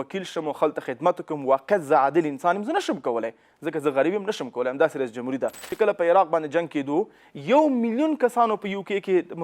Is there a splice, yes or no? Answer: yes